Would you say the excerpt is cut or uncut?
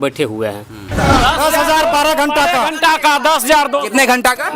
cut